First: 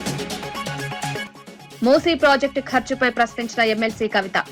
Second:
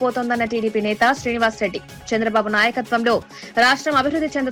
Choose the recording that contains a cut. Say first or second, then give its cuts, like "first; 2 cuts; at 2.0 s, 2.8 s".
first; 1 cut; at 1.2 s